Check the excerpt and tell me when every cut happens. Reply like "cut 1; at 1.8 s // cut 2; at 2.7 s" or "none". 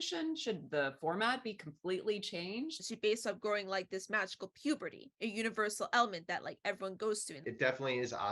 cut 1; at 2.8 s // cut 2; at 7.4 s

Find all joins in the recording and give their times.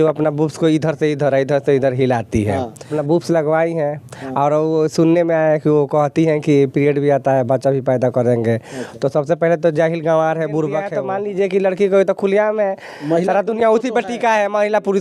cut 1; at 2.9 s // cut 2; at 11.0 s

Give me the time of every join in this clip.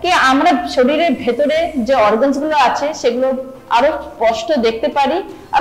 none

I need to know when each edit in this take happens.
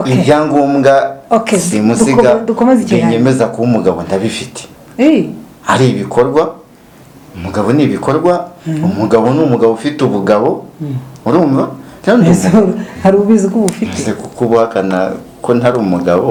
none

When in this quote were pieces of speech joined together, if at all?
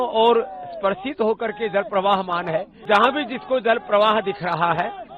cut 1; at 2.7 s

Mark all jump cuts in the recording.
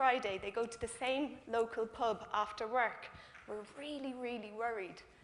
cut 1; at 3.7 s

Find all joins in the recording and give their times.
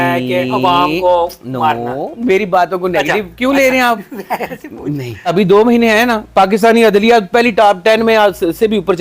cut 1; at 5.3 s

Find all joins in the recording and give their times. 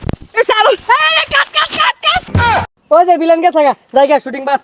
cut 1; at 2.5 s

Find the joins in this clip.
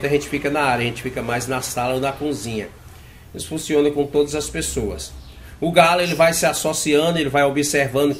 none

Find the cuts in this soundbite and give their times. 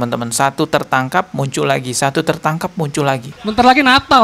cut 1; at 3.3 s

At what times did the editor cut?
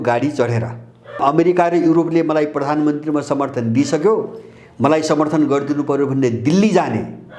cut 1; at 1.2 s

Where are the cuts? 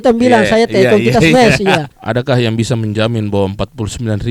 cut 1; at 2.0 s

